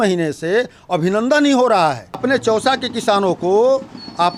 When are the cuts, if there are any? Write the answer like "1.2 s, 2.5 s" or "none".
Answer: 2.2 s

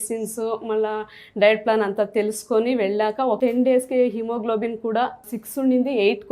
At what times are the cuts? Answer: 3.4 s

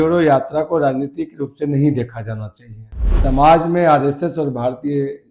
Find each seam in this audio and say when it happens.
3.1 s

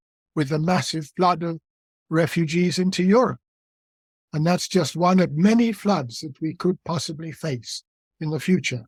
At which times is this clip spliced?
none

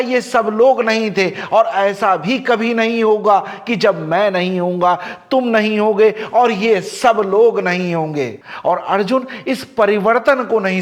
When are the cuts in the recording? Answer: 8.3 s

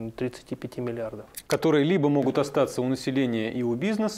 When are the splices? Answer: 1.3 s

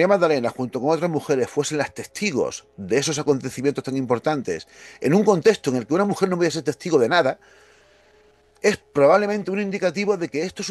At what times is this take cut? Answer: none

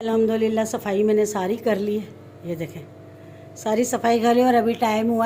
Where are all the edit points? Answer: none

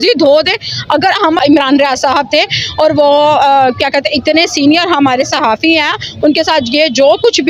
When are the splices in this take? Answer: 1.4 s

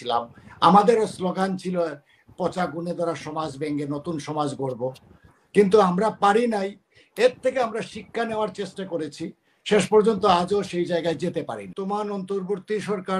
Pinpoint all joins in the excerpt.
11.7 s

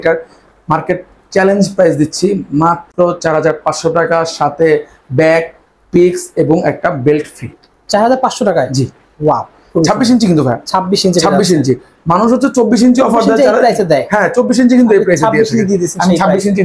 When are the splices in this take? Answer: none

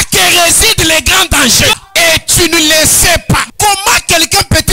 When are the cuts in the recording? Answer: 1.7 s, 3.5 s

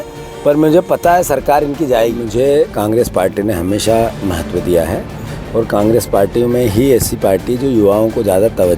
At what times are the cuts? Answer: 2.2 s

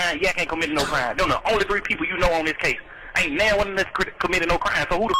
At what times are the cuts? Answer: none

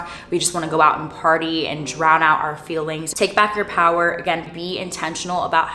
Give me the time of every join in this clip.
3.2 s

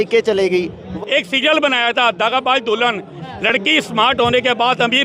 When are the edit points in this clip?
0.9 s

